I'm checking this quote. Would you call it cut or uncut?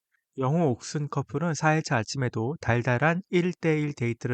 uncut